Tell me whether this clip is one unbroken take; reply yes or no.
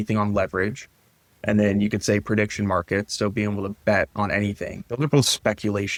yes